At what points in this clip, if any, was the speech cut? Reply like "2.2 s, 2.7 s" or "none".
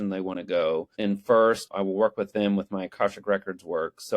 0.9 s, 1.7 s